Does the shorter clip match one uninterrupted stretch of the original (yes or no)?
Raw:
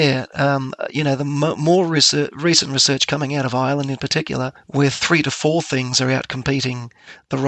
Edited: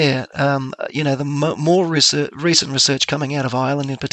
yes